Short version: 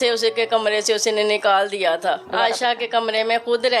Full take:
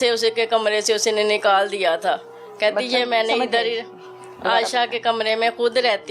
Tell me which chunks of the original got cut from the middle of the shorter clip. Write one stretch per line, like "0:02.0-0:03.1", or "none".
0:02.2-0:04.4